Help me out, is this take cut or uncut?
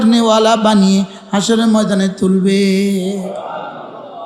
uncut